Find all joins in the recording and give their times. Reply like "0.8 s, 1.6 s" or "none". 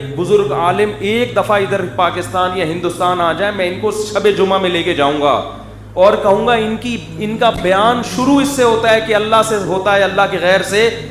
none